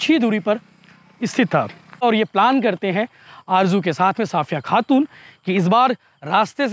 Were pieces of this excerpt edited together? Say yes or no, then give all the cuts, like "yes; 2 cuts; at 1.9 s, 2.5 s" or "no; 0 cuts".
yes; 1 cut; at 2.0 s